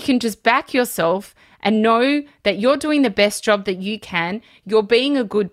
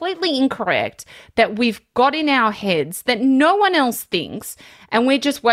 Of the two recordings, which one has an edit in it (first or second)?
first